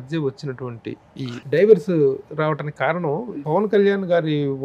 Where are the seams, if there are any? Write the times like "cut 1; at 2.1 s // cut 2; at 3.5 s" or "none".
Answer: none